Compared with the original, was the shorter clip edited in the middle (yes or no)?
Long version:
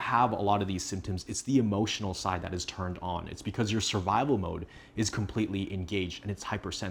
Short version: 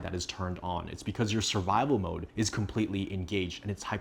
yes